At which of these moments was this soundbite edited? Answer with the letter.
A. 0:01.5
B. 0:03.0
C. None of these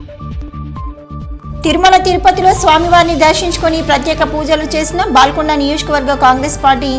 A